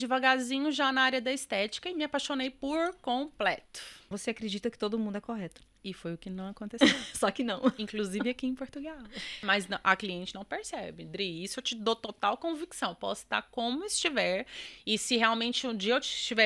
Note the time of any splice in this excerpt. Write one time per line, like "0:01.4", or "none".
0:04.2
0:09.4